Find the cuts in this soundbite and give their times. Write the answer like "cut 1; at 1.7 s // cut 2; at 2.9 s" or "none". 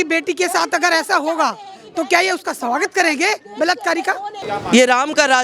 cut 1; at 4.4 s